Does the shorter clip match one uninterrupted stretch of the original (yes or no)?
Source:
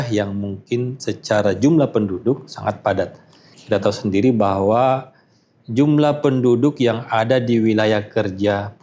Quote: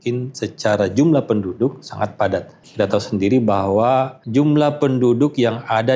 no